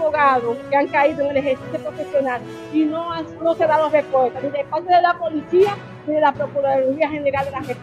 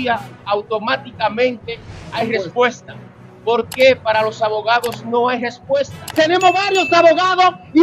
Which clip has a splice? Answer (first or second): second